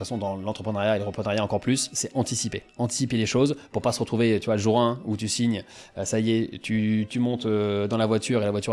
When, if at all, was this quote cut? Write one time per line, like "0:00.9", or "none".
none